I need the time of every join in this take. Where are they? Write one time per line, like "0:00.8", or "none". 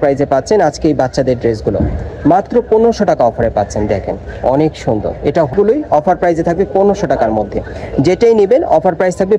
0:05.5